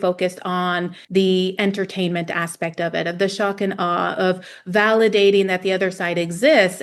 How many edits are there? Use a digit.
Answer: 1